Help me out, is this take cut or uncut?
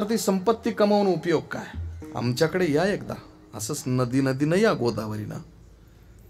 cut